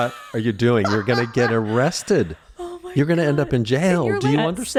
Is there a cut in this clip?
no; 0 cuts

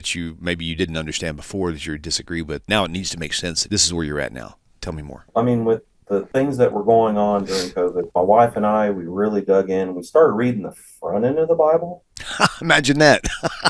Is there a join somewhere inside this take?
yes; 5 cuts; at 2.6 s, 3.6 s, 5.3 s, 6.3 s, 8.1 s

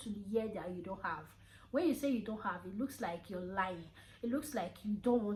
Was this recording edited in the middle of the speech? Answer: no; 0 cuts

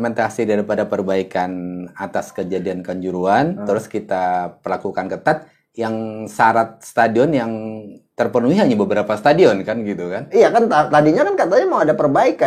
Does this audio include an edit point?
no; 0 cuts

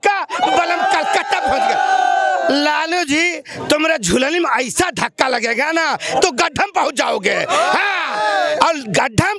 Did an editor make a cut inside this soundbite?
no; 0 cuts

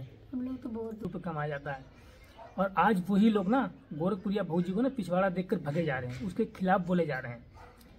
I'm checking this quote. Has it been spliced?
yes; 1 cut; at 1.0 s

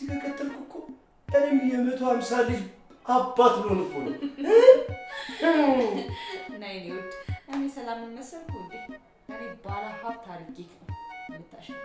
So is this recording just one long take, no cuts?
no; 1 cut; at 10.4 s

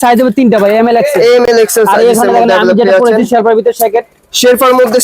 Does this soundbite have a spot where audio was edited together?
no; 0 cuts

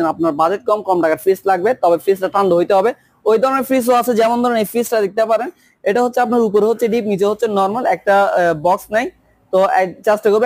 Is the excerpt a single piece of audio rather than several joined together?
yes; 0 cuts

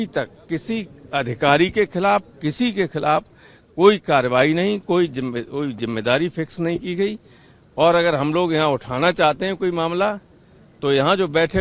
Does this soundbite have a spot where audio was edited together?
no; 0 cuts

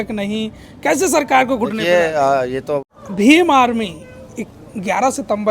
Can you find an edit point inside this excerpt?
yes; 1 cut; at 2.8 s

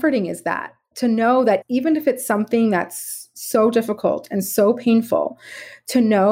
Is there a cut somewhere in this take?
yes; 2 cuts; at 0.8 s, 1.6 s

